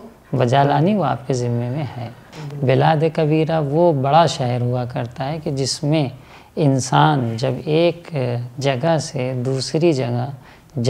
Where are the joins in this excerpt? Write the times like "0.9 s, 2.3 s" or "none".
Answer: 2.2 s